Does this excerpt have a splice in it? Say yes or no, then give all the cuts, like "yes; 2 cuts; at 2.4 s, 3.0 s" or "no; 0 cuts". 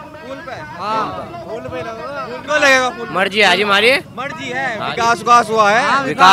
no; 0 cuts